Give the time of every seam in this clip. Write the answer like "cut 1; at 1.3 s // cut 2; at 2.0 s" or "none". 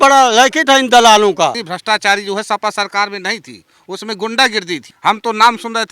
cut 1; at 1.7 s // cut 2; at 4.9 s